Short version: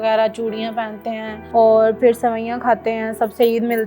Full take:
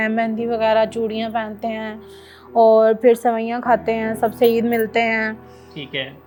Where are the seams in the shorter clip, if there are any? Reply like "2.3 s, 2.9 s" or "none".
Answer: 1.3 s

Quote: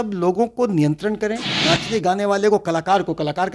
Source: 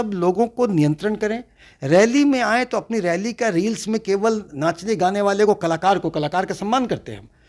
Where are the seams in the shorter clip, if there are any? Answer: 1.5 s

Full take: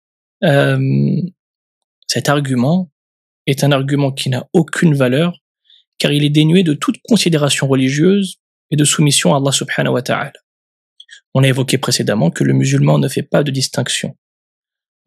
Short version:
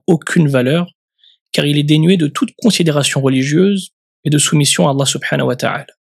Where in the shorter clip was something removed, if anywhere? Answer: none

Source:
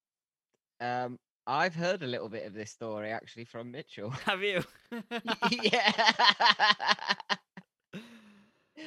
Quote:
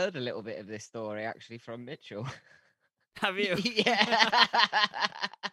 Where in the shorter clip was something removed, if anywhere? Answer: none

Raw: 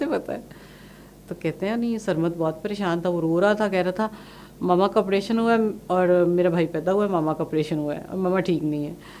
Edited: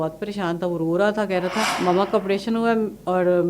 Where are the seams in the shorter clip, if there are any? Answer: 1.7 s

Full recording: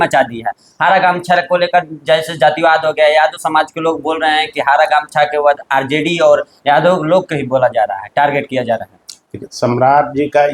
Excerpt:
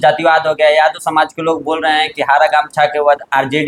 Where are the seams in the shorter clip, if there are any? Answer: none

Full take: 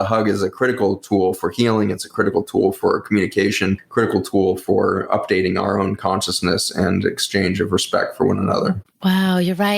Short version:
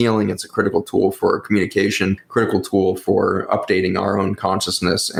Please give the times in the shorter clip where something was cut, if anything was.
none

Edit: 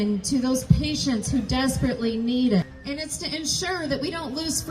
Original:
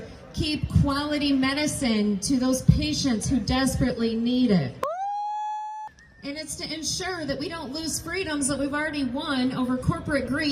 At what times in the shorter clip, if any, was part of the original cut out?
2.7 s

